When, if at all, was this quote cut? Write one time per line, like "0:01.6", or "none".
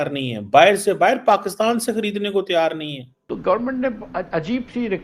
0:03.2